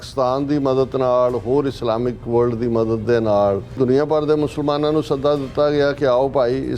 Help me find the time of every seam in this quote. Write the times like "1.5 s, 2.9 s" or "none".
3.8 s